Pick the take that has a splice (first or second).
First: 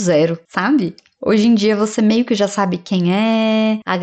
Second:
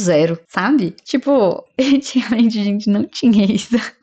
second